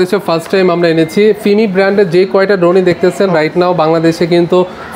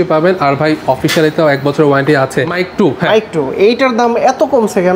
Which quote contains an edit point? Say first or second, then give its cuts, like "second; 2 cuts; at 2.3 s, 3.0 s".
second; 1 cut; at 2.5 s